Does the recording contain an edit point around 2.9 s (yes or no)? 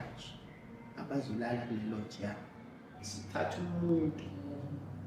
yes